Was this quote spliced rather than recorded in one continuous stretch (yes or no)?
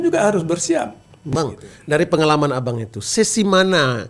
yes